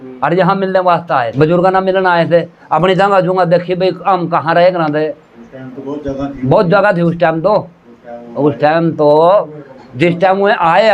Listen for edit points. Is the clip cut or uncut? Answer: cut